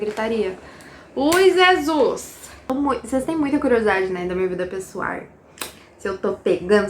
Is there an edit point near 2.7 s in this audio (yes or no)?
yes